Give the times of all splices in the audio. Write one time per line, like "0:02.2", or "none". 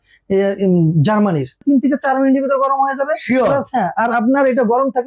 0:01.6